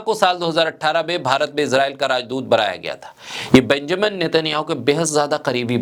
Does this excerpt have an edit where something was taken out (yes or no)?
no